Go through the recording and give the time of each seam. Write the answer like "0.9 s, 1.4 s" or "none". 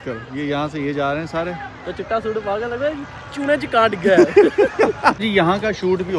5.2 s